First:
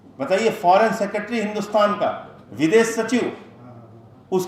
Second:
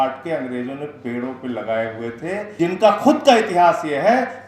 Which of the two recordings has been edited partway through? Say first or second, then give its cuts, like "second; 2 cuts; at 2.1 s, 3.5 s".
second; 1 cut; at 2.5 s